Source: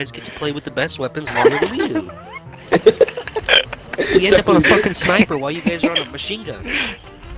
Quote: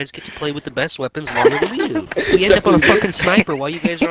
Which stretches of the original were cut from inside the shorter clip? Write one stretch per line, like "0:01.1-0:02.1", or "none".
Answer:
0:02.1-0:03.9